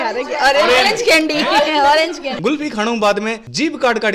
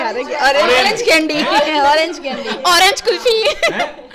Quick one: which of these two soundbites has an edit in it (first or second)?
first